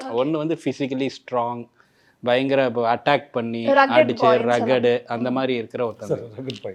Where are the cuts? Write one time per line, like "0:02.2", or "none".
none